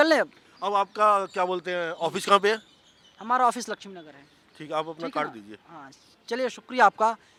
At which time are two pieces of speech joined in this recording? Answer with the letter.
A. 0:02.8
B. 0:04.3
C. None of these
C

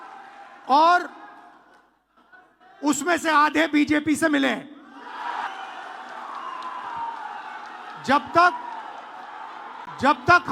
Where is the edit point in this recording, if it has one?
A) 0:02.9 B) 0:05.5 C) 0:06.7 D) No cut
B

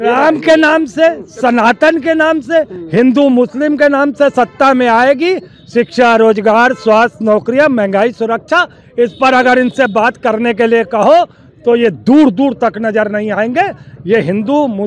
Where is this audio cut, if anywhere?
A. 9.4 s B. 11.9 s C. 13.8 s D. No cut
D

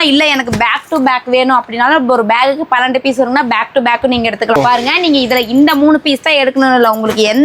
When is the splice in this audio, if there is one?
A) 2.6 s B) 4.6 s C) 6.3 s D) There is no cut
B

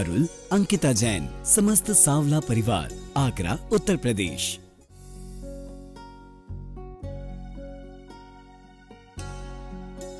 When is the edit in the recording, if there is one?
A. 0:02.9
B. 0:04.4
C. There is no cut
B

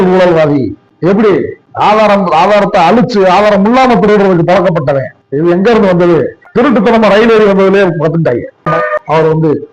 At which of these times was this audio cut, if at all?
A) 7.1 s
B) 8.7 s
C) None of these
B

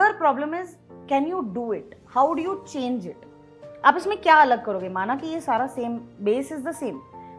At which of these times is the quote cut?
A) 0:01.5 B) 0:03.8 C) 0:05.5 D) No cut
D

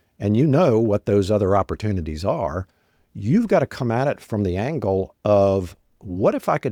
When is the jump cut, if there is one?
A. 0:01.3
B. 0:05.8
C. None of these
C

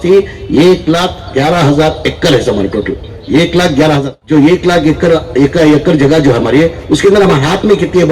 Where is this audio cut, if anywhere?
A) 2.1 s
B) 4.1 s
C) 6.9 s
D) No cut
B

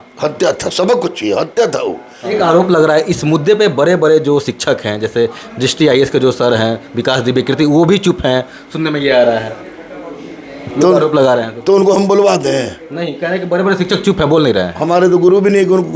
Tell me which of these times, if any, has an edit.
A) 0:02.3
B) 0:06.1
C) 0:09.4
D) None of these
A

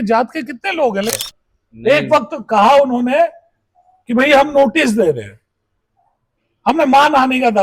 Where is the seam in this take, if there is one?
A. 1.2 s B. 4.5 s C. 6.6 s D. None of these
A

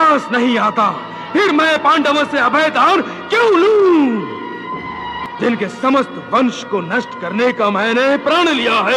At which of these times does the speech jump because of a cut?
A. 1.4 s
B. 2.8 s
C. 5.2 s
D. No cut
C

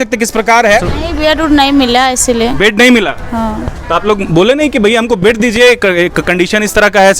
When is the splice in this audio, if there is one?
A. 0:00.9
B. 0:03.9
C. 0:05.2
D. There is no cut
A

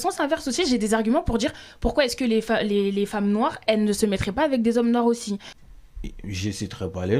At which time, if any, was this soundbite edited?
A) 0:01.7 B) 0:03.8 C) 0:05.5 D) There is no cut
C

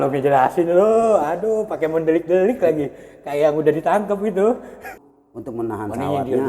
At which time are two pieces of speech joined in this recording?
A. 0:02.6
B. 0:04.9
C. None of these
B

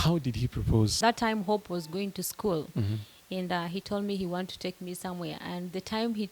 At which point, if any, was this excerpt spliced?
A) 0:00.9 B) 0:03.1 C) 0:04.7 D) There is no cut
A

